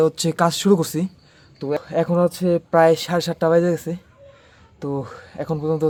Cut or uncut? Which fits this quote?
uncut